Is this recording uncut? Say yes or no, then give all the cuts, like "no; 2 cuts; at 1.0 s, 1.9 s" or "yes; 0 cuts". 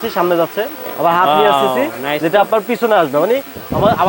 yes; 0 cuts